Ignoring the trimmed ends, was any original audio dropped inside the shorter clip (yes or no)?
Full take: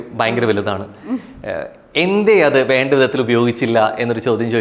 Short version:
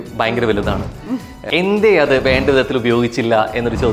yes